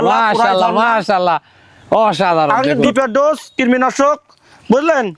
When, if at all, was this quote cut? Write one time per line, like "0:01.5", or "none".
0:02.9